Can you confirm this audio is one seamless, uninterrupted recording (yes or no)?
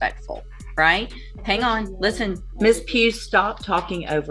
no